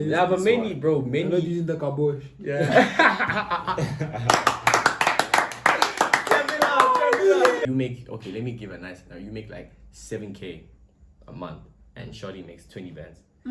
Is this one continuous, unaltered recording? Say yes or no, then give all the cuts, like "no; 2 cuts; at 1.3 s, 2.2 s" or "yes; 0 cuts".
no; 1 cut; at 7.6 s